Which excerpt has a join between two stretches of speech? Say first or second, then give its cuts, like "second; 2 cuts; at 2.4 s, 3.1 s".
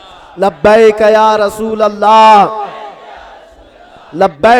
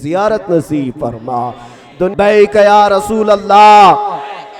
second; 1 cut; at 2.1 s